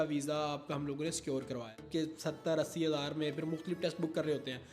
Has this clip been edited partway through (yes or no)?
yes